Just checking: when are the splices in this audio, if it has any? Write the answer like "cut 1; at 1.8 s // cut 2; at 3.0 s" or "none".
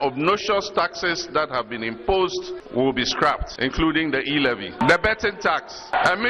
cut 1; at 2.6 s // cut 2; at 3.5 s